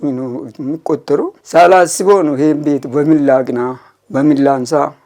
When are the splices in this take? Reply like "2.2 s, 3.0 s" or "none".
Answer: 1.4 s